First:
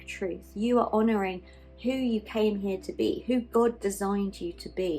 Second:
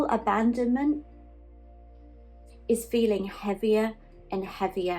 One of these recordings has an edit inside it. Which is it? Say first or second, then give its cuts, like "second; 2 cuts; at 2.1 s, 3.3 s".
second; 2 cuts; at 1.1 s, 2.6 s